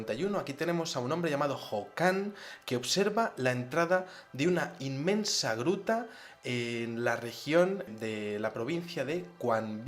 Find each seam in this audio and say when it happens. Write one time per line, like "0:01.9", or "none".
0:07.7

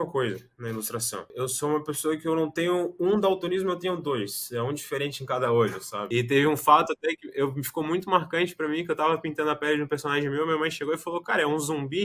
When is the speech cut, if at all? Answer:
0:01.2
0:05.9

